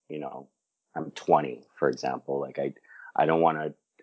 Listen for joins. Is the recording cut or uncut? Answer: uncut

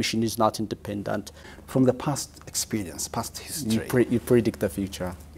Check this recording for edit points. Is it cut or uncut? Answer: cut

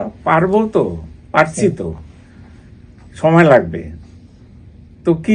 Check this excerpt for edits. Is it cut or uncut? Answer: uncut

